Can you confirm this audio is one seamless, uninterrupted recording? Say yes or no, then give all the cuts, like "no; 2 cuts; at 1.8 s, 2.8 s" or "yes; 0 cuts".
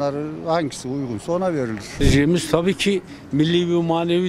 no; 1 cut; at 2.0 s